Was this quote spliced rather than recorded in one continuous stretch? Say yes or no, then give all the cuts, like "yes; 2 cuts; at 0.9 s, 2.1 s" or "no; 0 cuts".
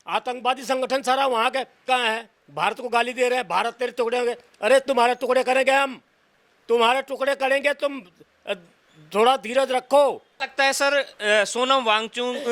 no; 0 cuts